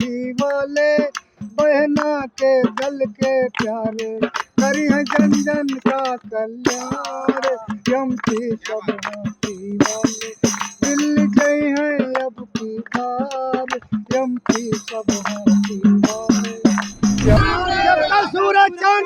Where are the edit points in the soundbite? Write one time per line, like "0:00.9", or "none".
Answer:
0:17.4